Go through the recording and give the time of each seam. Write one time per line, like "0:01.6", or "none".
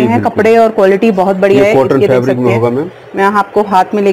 none